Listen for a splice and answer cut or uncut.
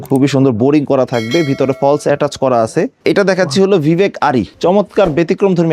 cut